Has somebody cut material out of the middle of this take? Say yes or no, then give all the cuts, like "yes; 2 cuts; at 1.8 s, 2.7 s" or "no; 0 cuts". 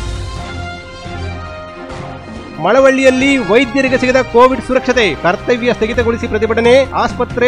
yes; 1 cut; at 1.3 s